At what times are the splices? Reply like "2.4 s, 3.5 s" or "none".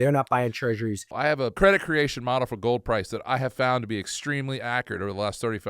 1.3 s

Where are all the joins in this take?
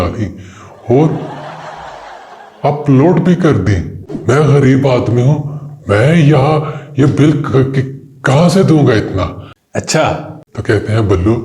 4.1 s

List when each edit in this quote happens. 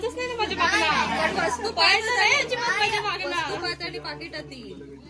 none

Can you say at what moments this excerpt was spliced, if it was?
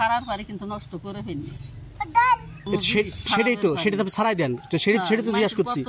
2.5 s

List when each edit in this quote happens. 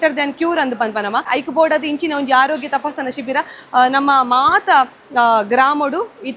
1.3 s

